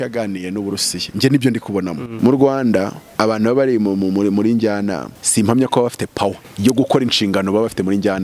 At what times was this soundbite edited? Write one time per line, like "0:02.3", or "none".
0:02.1
0:03.0
0:05.1
0:06.5

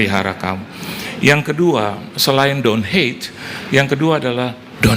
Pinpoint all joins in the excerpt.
none

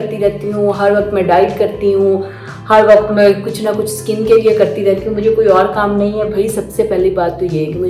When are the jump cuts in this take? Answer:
none

